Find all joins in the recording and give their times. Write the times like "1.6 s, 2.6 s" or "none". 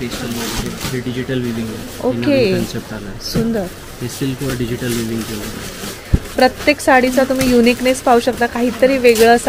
none